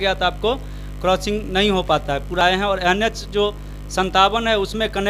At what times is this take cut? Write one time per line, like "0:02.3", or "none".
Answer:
0:02.4